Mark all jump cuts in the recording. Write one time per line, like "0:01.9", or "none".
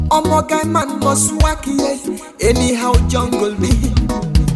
none